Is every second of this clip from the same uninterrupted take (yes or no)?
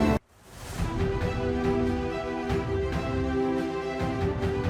yes